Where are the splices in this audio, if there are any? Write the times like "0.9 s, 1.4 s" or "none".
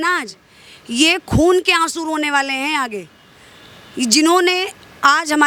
none